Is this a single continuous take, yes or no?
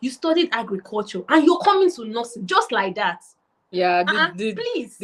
yes